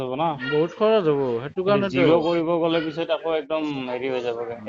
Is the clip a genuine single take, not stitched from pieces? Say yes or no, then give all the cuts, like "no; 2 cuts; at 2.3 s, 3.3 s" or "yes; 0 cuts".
yes; 0 cuts